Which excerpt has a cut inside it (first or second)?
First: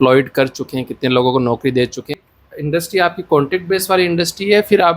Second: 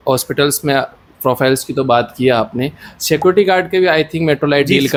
first